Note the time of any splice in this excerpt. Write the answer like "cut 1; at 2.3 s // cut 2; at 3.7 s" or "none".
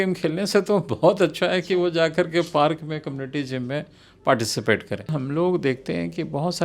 cut 1; at 5.1 s